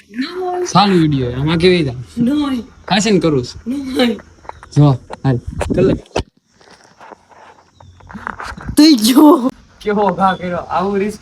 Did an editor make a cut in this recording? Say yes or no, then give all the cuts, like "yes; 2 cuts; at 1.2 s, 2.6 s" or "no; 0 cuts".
yes; 1 cut; at 9.5 s